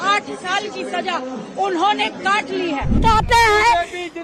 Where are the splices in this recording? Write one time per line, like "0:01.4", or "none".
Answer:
0:03.0